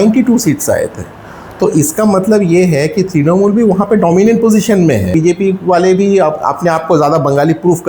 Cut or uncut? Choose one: cut